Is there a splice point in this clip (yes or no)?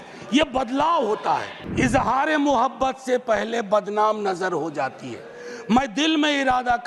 yes